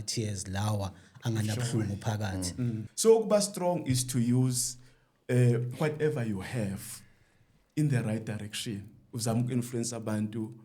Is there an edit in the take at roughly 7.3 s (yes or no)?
no